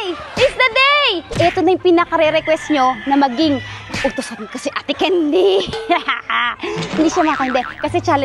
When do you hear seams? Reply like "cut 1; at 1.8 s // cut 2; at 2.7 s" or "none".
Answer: cut 1; at 1.3 s // cut 2; at 6.9 s